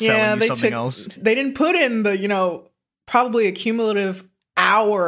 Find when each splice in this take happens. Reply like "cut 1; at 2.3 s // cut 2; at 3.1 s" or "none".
cut 1; at 1.2 s